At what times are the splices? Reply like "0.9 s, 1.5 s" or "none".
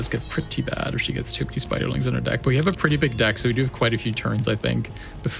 none